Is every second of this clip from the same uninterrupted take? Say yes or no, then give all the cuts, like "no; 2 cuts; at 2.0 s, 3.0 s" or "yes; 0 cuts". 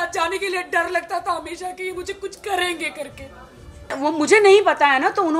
no; 1 cut; at 3.9 s